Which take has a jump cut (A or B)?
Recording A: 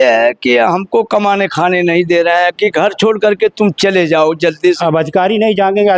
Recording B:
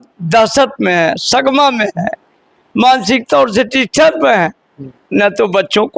A